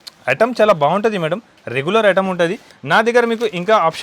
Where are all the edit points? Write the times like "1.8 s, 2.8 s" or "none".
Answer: 2.7 s